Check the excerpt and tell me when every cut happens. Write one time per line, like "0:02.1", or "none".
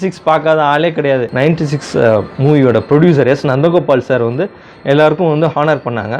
0:01.3